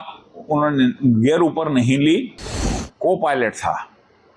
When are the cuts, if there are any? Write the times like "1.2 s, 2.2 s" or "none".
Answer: 2.8 s

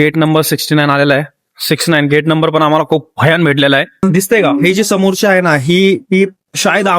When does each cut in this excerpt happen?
4.0 s

